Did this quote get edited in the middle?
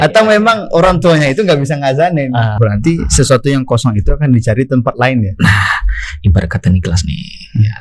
yes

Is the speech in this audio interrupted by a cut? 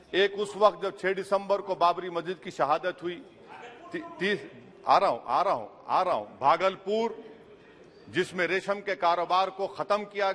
no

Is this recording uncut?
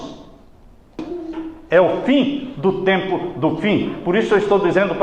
no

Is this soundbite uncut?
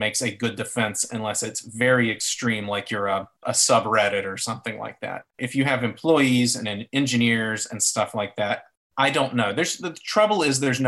no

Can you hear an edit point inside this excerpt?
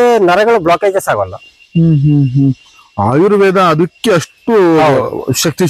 no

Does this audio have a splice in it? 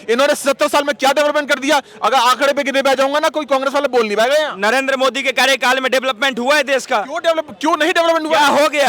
no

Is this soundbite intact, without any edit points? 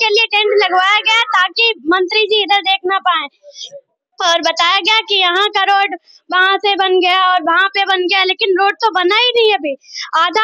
yes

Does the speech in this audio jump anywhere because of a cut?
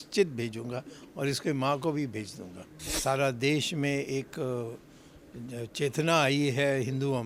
yes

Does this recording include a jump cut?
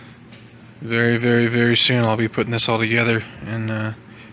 no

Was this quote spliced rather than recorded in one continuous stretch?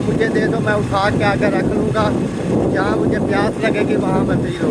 no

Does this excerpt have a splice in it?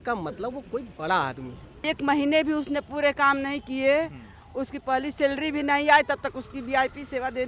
yes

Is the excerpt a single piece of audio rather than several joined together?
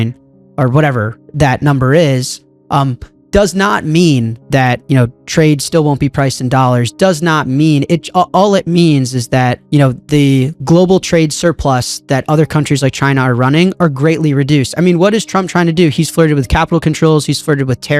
yes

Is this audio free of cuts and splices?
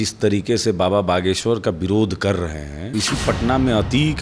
no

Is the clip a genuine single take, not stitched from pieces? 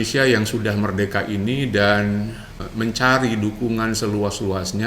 no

